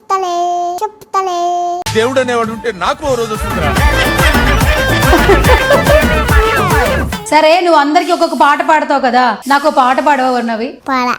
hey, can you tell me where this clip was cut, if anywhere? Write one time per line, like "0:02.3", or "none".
0:06.9